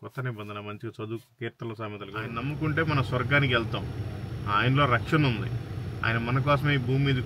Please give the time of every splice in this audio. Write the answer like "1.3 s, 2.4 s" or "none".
2.3 s